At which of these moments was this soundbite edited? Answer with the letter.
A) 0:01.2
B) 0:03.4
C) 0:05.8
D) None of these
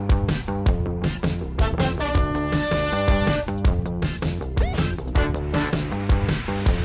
C